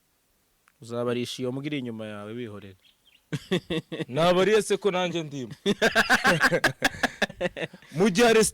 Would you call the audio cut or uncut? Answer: cut